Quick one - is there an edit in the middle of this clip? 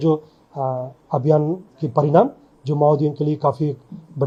no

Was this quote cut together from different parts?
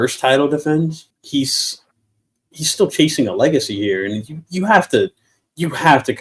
yes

